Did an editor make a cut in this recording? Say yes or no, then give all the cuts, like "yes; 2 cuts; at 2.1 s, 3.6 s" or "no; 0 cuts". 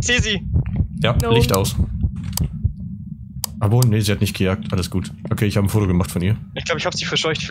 no; 0 cuts